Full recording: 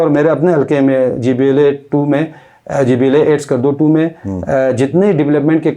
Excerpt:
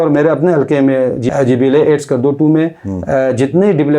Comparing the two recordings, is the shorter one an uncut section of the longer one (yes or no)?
no